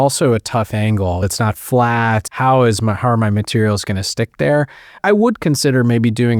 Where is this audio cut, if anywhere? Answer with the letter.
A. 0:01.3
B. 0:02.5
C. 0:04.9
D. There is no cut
A